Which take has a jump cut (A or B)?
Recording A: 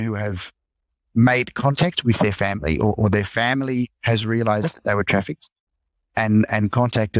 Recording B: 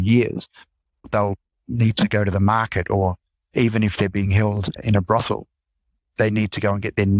B